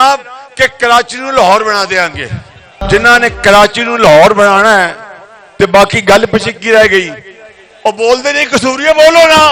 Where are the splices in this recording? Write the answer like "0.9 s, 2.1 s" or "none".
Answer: none